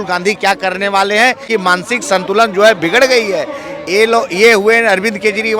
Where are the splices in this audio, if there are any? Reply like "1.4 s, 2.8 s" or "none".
1.4 s